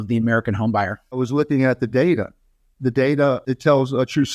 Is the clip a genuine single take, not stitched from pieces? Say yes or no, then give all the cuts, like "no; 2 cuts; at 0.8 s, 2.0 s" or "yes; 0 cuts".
no; 2 cuts; at 1.2 s, 3.4 s